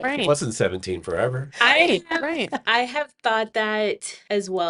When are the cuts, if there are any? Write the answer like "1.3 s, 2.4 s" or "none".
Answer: 3.8 s